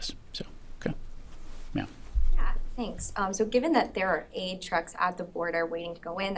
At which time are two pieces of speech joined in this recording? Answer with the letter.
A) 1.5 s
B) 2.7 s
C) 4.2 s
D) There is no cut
B